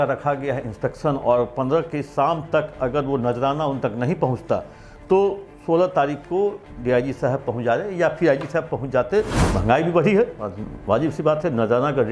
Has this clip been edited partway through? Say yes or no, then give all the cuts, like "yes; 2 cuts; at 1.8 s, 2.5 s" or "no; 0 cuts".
yes; 1 cut; at 9.4 s